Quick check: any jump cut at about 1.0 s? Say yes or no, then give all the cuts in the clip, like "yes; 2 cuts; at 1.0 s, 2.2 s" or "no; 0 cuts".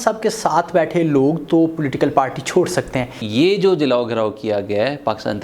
no; 1 cut; at 3.2 s